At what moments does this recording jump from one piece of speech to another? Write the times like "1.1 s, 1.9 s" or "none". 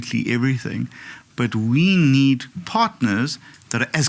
2.5 s